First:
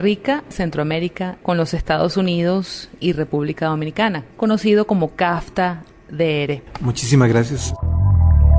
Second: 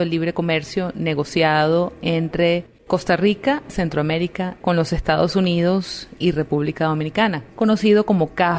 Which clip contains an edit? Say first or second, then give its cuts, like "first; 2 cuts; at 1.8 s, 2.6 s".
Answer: first; 2 cuts; at 6.7 s, 7.7 s